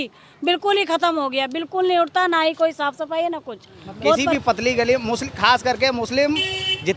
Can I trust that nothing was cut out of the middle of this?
no; 1 cut; at 4.3 s

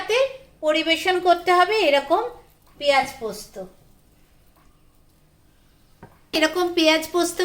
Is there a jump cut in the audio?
yes; 1 cut; at 6.3 s

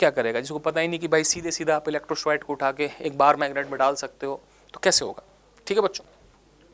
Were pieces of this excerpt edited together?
no; 0 cuts

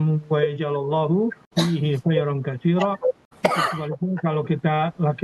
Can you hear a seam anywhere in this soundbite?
yes; 2 cuts; at 1.4 s, 3.3 s

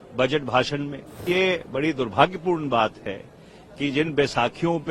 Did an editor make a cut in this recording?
yes; 1 cut; at 1.2 s

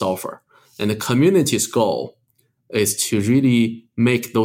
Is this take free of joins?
no; 1 cut; at 3.0 s

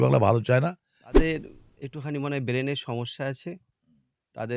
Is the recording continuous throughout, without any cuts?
no; 1 cut; at 1.1 s

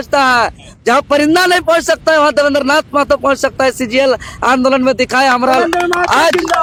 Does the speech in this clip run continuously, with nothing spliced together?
yes; 0 cuts

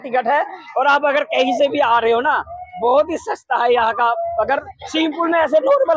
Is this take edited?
no; 0 cuts

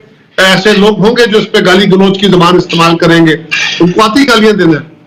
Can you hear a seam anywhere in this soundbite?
no; 0 cuts

